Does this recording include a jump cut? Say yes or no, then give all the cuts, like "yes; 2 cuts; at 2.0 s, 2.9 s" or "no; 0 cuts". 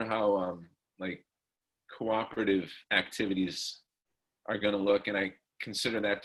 no; 0 cuts